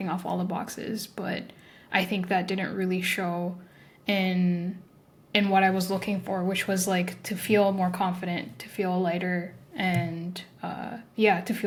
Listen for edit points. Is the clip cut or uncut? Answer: uncut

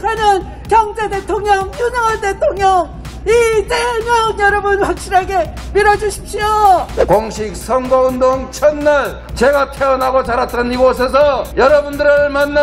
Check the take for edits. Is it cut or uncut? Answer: cut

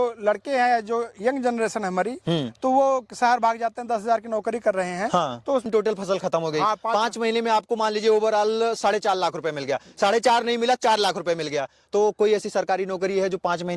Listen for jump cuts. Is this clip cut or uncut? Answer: cut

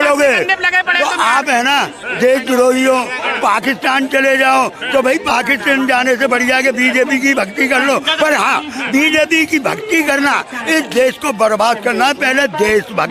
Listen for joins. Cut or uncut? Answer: uncut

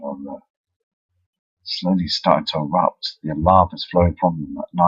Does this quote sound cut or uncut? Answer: cut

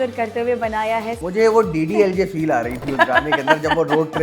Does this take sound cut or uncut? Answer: cut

